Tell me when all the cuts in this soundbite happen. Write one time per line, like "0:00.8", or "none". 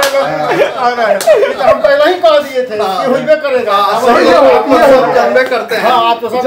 none